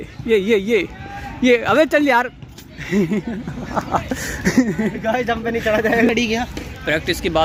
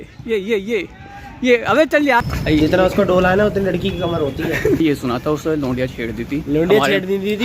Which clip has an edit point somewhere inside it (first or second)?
second